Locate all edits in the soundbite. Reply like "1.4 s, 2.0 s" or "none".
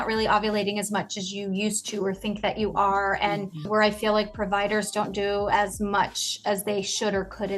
3.7 s

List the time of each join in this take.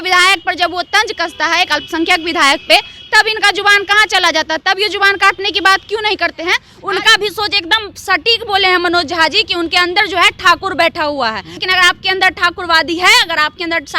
6.7 s, 11.6 s

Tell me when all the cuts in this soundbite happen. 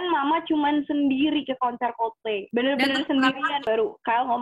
2.4 s, 3.6 s

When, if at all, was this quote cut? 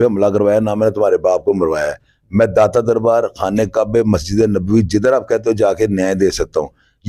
none

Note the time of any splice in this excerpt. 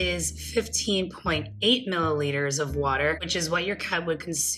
none

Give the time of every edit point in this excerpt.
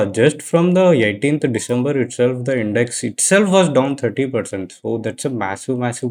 none

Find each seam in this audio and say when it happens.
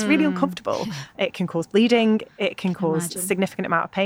1.1 s

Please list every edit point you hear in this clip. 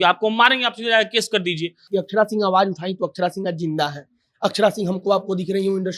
1.9 s

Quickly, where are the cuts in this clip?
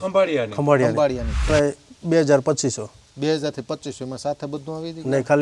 1.5 s

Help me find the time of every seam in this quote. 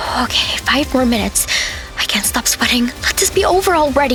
none

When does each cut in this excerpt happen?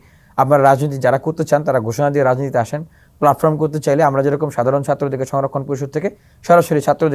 none

